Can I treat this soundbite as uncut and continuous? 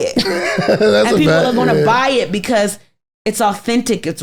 yes; 0 cuts

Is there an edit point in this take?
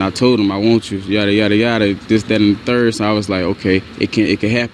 no; 0 cuts

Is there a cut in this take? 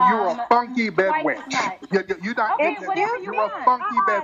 no; 0 cuts

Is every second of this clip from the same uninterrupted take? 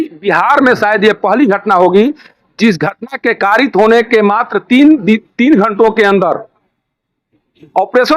yes; 0 cuts

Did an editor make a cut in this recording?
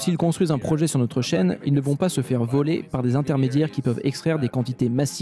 no; 0 cuts

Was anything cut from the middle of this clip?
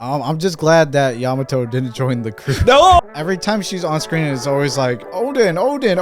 yes; 1 cut; at 3.0 s

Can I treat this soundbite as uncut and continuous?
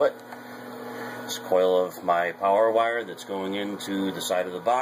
no; 1 cut; at 3.5 s

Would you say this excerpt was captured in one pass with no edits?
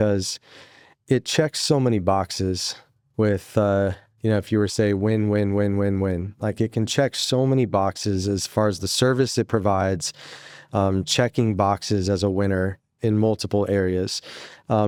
yes; 0 cuts

